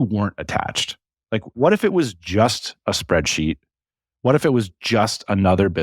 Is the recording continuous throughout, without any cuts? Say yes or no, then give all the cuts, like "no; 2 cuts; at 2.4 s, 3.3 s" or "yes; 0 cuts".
no; 1 cut; at 1.5 s